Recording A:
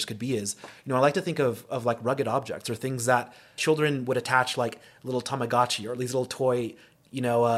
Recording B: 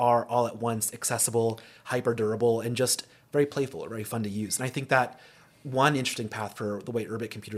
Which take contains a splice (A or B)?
A